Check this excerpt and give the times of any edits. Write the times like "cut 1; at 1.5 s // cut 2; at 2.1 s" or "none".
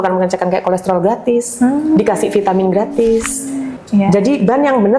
cut 1; at 3.7 s

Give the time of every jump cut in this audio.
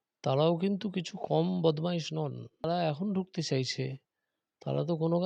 cut 1; at 2.6 s

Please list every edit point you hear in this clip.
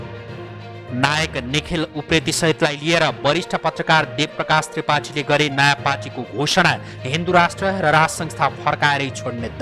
cut 1; at 0.9 s

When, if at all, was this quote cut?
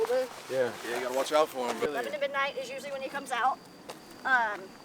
cut 1; at 1.9 s

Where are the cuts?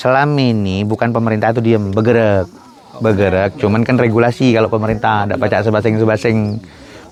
none

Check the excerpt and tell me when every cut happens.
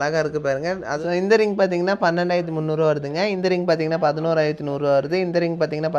cut 1; at 1.0 s

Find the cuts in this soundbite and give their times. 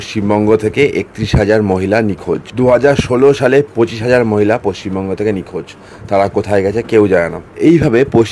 cut 1; at 2.5 s // cut 2; at 7.4 s

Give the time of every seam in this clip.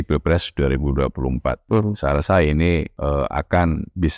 cut 1; at 1.6 s // cut 2; at 2.9 s

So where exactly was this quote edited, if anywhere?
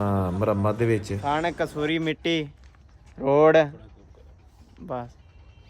cut 1; at 1.1 s

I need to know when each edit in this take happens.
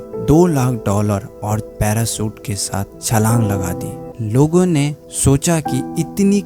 cut 1; at 4.0 s

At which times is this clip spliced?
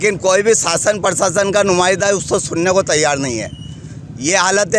none

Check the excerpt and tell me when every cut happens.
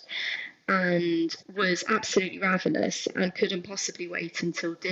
cut 1; at 1.4 s

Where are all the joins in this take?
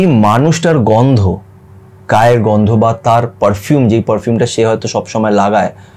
none

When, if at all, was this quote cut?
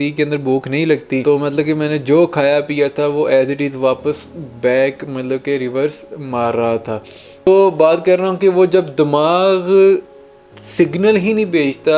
cut 1; at 1.2 s // cut 2; at 7.5 s

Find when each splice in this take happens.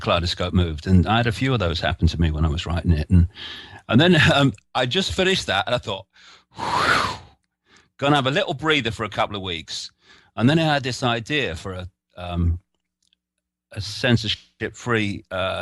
none

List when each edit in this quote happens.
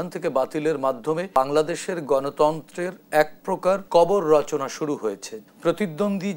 cut 1; at 1.3 s // cut 2; at 3.8 s // cut 3; at 5.4 s

